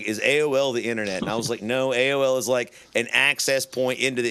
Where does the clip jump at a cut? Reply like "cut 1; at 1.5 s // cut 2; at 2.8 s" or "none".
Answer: none